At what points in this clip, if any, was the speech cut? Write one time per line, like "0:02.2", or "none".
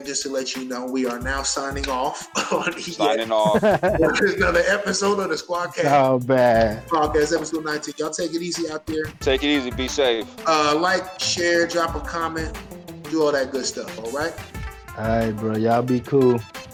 none

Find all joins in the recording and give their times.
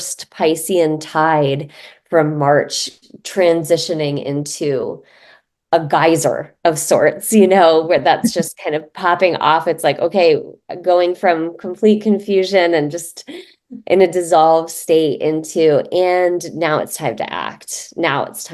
none

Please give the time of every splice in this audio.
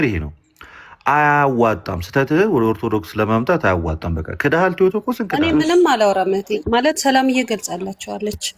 0:05.3

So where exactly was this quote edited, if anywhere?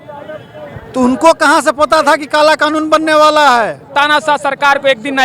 0:03.9

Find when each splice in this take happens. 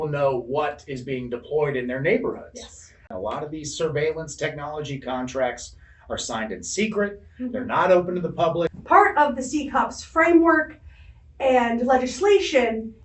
0:03.1
0:08.8

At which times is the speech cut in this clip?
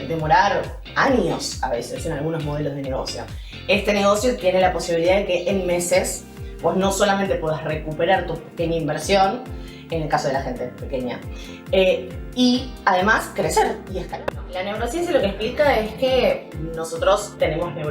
0:13.9

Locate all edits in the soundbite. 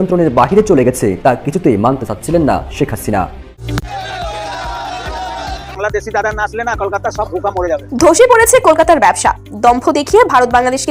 0:03.6

